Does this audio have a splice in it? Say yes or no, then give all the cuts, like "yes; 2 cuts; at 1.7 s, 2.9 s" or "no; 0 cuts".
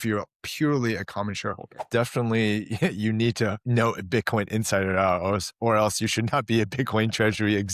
yes; 2 cuts; at 1.8 s, 3.6 s